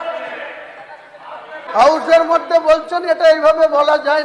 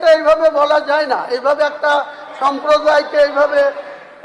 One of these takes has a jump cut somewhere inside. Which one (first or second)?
first